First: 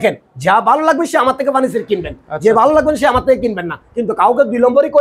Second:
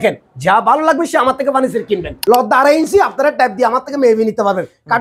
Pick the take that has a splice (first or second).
second